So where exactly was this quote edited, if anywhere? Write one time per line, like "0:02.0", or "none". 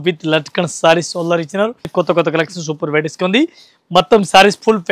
0:01.9